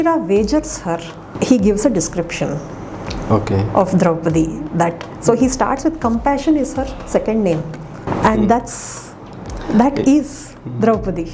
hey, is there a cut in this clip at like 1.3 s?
yes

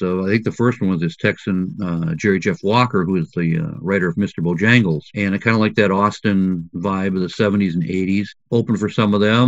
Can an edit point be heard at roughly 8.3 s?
yes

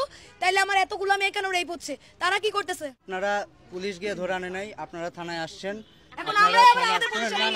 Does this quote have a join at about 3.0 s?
yes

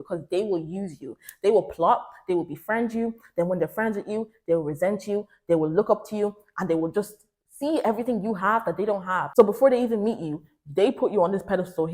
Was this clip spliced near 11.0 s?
no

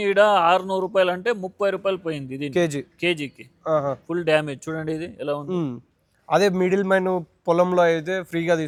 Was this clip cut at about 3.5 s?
no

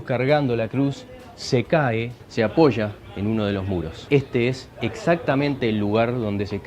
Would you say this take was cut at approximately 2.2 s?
yes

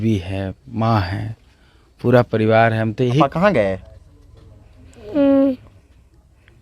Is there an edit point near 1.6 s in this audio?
no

